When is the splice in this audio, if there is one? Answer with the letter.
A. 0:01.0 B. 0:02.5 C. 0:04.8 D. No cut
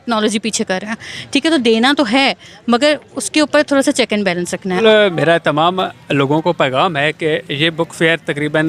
C